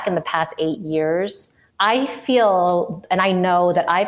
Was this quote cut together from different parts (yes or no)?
no